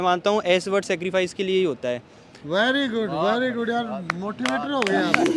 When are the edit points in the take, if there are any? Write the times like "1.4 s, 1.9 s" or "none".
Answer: none

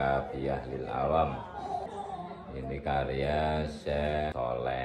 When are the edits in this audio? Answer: 1.8 s

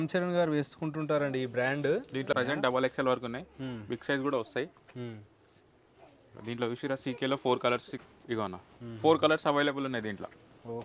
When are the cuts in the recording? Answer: 2.4 s, 8.0 s

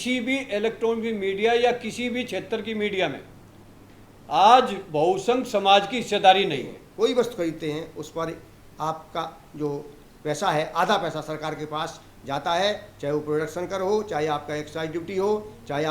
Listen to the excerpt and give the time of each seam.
6.8 s

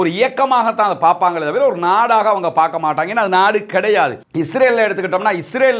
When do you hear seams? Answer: 4.2 s

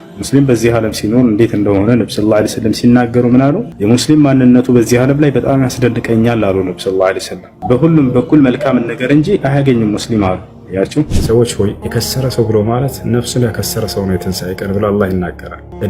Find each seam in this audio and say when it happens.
3.7 s, 7.5 s, 11.1 s

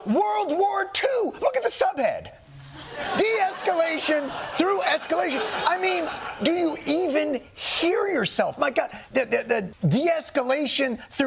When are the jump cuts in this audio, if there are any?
9.7 s

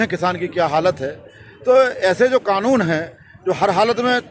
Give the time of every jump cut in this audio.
none

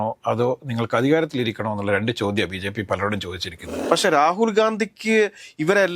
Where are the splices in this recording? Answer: 3.7 s

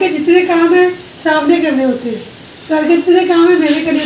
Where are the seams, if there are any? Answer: none

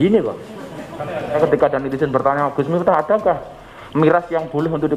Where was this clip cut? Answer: 1.4 s

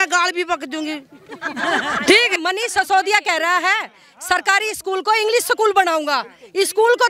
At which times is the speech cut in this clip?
2.3 s

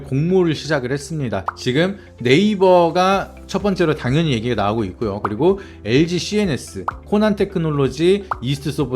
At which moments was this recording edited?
1.5 s

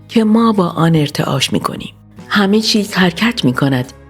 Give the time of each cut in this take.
none

